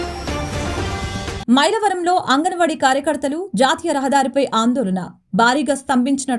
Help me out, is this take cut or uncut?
cut